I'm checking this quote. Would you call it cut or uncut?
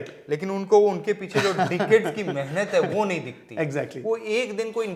uncut